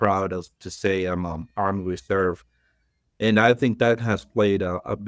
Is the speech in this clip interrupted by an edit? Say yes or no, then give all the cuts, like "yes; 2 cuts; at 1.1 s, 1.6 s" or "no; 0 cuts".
no; 0 cuts